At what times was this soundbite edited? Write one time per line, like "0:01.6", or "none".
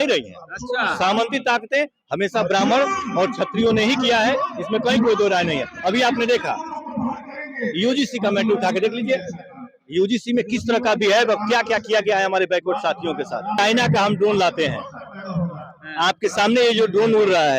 0:13.6